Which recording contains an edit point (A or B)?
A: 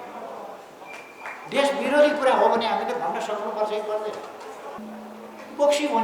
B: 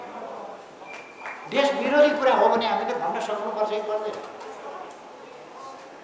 A